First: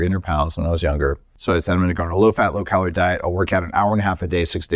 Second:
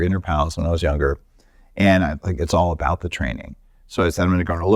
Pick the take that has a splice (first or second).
first